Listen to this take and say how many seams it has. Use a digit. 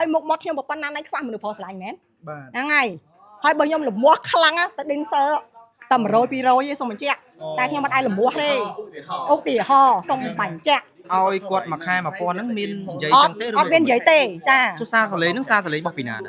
1